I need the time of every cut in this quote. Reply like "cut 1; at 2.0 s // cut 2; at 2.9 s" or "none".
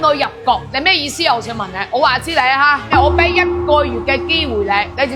none

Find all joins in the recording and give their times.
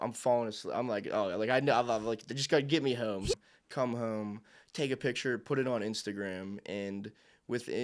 cut 1; at 3.4 s

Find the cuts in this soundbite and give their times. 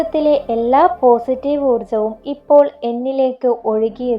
none

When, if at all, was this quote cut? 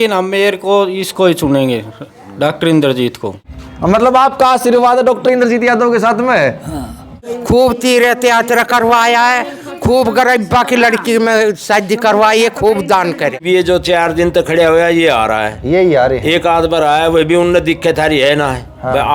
cut 1; at 3.5 s // cut 2; at 7.1 s // cut 3; at 13.4 s

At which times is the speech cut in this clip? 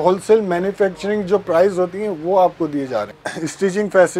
cut 1; at 3.2 s

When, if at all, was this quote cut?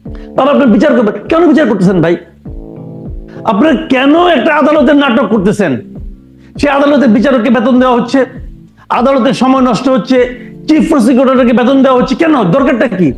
none

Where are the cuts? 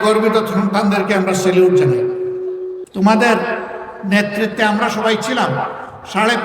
cut 1; at 2.8 s

